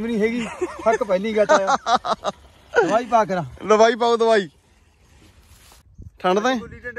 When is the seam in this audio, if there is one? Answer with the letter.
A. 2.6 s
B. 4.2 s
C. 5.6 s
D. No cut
C